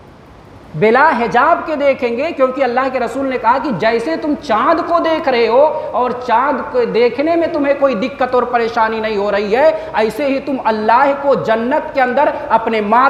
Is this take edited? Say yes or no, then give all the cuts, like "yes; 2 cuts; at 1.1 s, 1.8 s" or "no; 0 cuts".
no; 0 cuts